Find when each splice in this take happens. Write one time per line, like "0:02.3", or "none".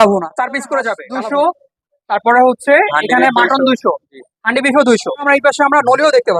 0:01.0
0:05.3

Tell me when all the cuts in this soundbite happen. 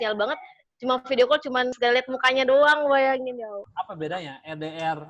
0:01.8
0:03.6

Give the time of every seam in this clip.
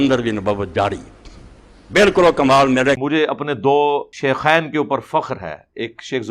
0:03.0
0:04.1

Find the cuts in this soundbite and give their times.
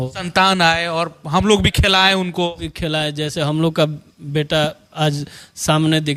none

